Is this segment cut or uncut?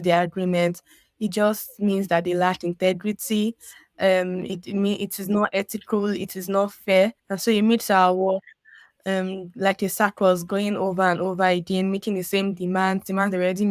cut